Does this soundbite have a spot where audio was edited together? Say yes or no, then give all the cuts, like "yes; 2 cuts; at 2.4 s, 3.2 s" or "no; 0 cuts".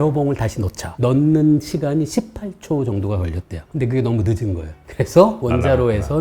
no; 0 cuts